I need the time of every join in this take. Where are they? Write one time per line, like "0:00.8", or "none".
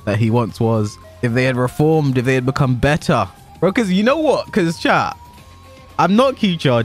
0:01.0